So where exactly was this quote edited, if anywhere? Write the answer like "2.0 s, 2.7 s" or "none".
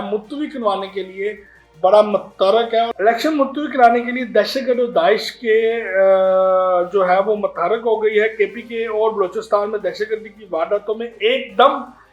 2.9 s